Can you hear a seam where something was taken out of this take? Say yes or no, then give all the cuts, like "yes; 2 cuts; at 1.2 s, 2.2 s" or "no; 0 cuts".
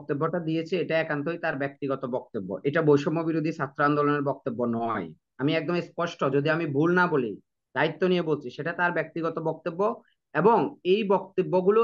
no; 0 cuts